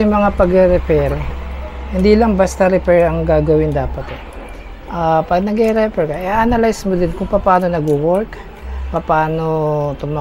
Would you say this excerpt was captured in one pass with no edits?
yes; 0 cuts

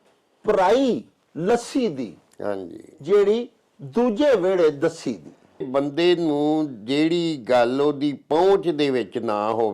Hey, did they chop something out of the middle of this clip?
yes; 1 cut; at 5.7 s

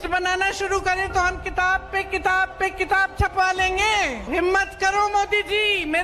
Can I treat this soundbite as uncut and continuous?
no; 1 cut; at 4.3 s

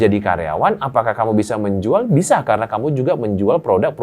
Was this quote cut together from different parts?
no; 0 cuts

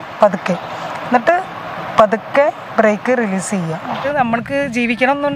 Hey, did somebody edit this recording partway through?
yes; 1 cut; at 4.0 s

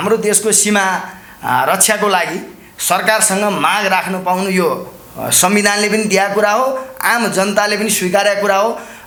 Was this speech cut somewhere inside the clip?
no; 0 cuts

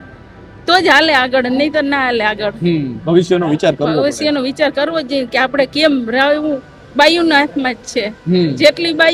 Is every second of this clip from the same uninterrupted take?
yes; 0 cuts

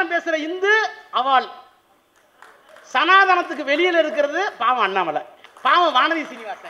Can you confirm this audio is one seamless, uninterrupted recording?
no; 1 cut; at 5.4 s

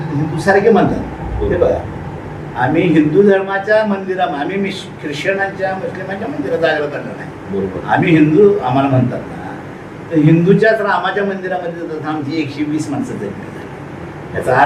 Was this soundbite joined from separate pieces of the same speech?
no; 0 cuts

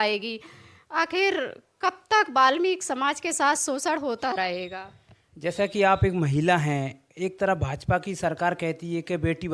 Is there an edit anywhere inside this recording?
no; 0 cuts

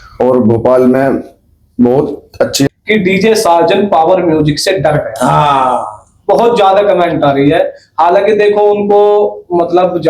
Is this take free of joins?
no; 1 cut; at 2.7 s

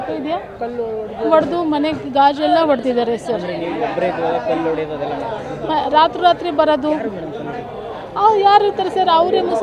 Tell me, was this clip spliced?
no; 0 cuts

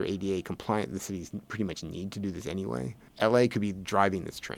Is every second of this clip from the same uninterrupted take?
no; 1 cut; at 3.1 s

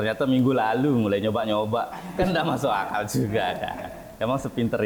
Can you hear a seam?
no; 0 cuts

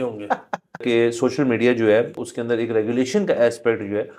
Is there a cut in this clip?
yes; 2 cuts; at 0.8 s, 2.3 s

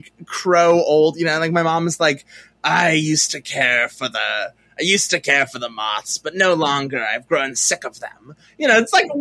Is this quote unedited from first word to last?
yes; 0 cuts

